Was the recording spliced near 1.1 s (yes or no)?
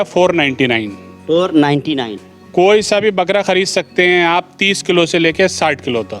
no